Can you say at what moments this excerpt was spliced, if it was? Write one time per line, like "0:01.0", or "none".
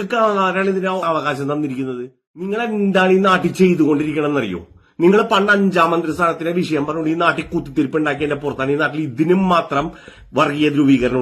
0:02.5